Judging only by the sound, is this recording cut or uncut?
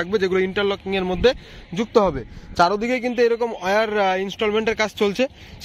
uncut